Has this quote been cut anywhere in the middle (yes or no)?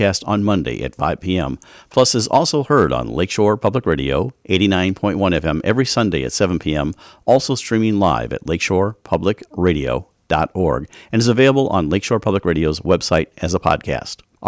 no